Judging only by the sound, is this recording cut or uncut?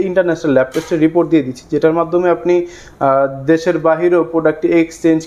uncut